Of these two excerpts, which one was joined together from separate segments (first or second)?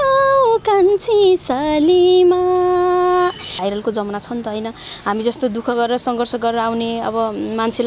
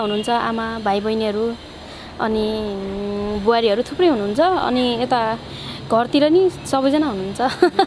first